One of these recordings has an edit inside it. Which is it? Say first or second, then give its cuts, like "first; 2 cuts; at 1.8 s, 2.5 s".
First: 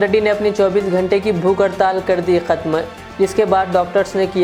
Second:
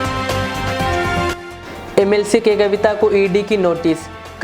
second; 1 cut; at 1.3 s